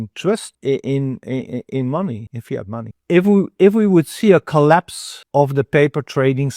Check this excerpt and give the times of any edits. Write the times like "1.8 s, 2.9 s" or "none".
2.9 s